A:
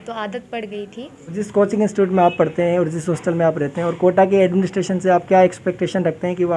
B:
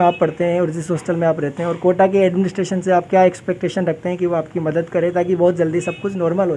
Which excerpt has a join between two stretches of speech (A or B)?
A